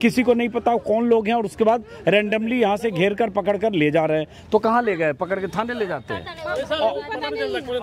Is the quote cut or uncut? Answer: uncut